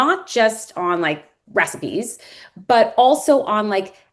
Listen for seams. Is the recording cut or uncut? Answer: uncut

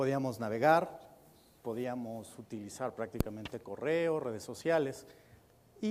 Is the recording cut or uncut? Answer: uncut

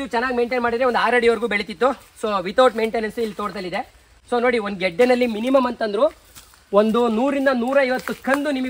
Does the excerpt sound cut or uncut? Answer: uncut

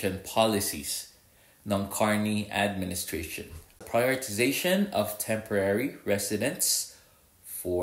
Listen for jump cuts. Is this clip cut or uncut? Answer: cut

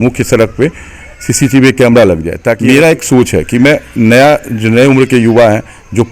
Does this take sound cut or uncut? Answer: cut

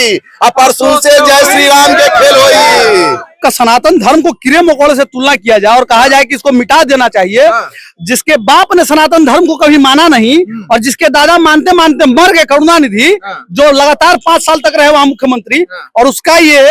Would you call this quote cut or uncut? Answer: cut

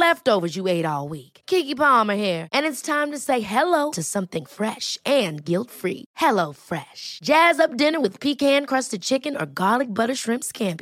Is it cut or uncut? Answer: uncut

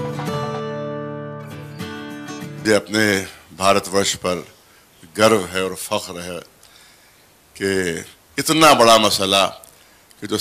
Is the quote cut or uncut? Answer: cut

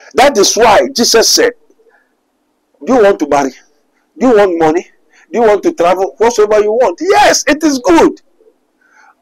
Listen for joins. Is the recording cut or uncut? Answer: uncut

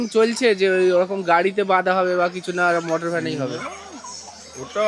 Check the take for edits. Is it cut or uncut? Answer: uncut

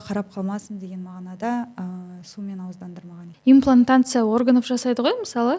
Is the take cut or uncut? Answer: cut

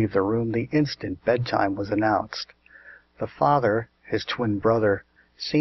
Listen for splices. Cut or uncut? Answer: cut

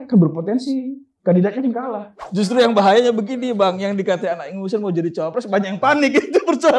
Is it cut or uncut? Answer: cut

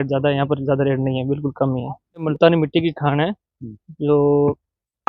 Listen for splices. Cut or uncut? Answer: cut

